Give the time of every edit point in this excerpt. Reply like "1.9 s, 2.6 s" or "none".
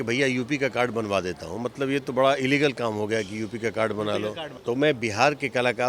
4.5 s